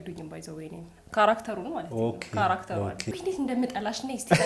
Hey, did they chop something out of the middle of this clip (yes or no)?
yes